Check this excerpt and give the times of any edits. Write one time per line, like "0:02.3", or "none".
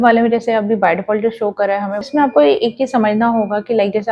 0:02.1